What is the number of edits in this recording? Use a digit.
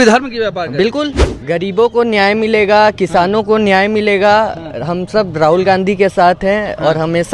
1